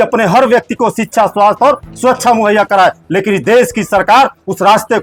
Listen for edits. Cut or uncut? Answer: uncut